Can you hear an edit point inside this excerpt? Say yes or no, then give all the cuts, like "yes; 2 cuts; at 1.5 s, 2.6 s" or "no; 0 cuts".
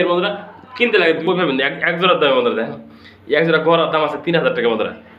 yes; 1 cut; at 1.2 s